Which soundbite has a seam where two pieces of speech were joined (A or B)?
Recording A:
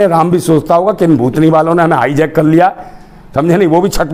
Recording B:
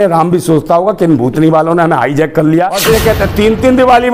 B